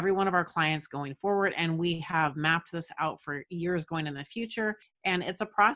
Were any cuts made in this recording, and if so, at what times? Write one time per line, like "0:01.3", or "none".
0:04.9